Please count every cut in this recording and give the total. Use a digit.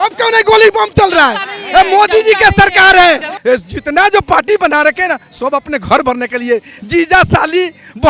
1